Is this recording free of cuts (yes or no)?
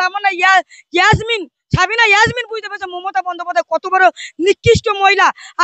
yes